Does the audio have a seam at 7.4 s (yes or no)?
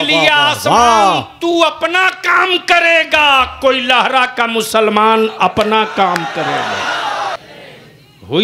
yes